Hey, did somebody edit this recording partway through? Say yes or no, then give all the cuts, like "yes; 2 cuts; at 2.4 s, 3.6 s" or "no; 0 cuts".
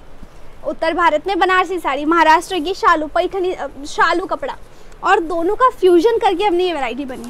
no; 0 cuts